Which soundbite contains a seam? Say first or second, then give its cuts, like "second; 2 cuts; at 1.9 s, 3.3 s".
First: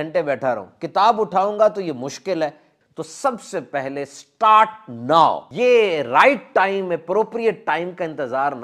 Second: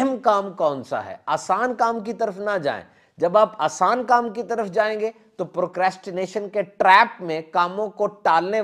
first; 2 cuts; at 2.7 s, 5.5 s